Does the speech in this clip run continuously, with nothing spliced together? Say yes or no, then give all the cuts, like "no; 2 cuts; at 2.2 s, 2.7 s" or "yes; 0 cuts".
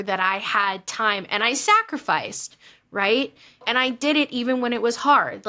no; 1 cut; at 3.7 s